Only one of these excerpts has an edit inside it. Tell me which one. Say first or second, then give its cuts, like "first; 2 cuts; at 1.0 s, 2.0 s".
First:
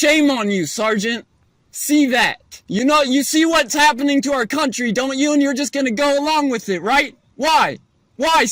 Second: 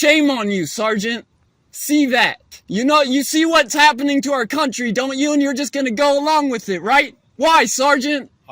second; 1 cut; at 7.2 s